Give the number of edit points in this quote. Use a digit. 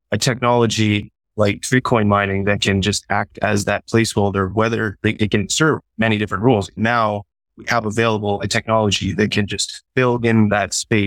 1